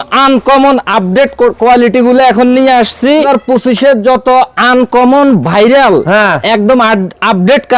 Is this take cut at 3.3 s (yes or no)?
yes